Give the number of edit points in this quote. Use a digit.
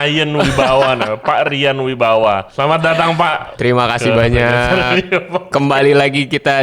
2